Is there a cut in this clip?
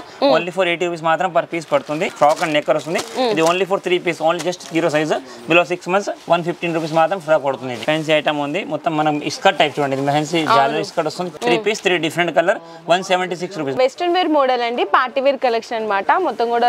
yes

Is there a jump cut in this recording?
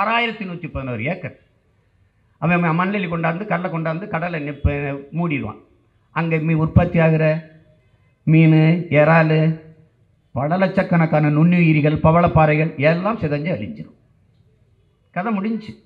no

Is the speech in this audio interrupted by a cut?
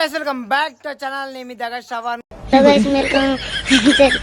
yes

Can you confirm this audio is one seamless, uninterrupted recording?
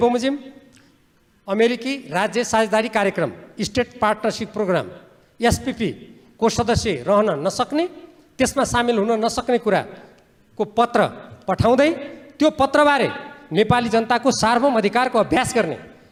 yes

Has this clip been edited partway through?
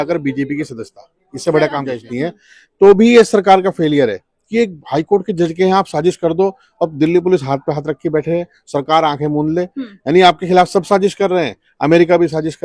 yes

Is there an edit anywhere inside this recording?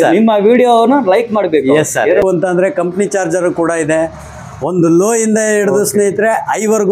yes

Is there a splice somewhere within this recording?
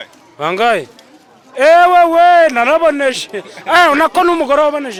no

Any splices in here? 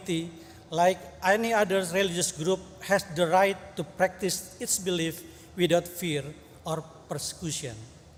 no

